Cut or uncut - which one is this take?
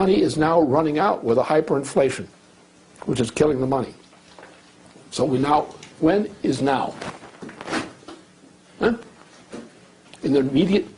uncut